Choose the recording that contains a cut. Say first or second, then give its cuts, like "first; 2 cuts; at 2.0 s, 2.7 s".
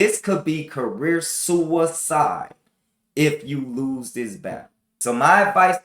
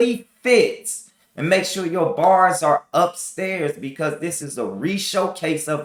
first; 1 cut; at 4.9 s